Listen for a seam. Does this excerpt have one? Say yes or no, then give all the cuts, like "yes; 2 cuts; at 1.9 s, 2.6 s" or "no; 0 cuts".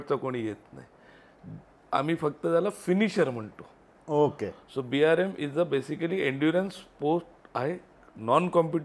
no; 0 cuts